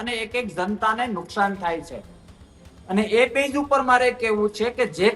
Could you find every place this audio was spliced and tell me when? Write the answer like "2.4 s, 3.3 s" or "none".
none